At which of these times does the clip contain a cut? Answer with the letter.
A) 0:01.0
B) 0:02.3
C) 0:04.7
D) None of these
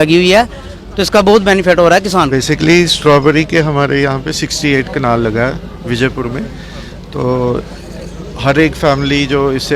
B